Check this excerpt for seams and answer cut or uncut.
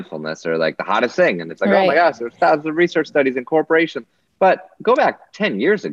uncut